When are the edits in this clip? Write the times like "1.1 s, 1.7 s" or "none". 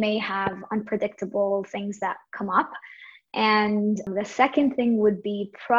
4.1 s